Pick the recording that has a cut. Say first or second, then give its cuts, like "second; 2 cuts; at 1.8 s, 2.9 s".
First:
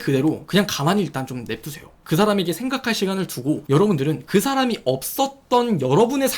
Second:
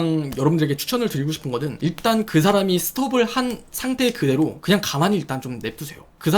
first; 1 cut; at 4.2 s